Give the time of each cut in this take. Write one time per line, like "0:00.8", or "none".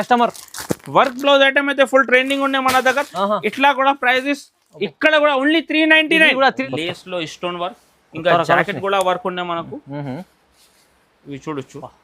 0:06.6